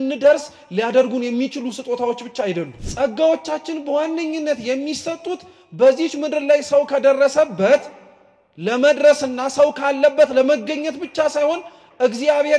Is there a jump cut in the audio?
yes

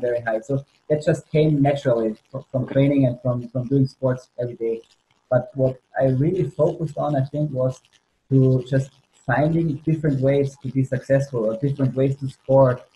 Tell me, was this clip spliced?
no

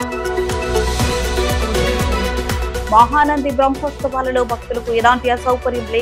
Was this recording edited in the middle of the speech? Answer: no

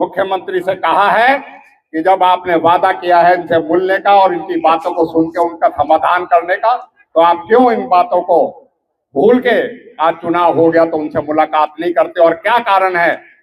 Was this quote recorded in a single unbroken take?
yes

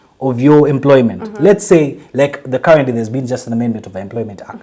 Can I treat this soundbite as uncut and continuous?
yes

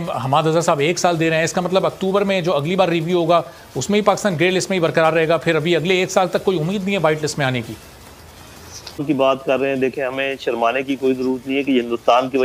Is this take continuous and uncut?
no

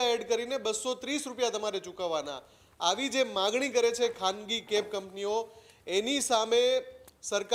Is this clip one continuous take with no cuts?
yes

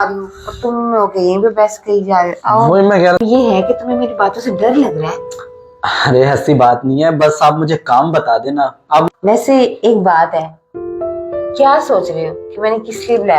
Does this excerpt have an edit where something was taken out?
yes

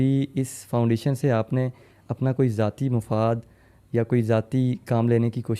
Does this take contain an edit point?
no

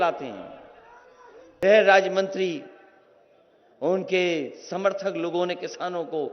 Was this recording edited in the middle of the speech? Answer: yes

